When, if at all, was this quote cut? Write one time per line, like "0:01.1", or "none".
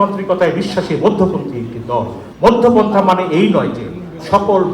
0:02.2

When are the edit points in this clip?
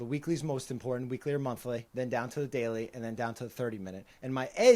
0:01.9

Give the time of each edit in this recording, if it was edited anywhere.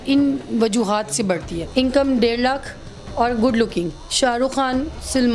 0:01.6

